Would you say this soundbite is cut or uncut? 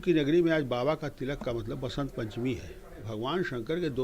cut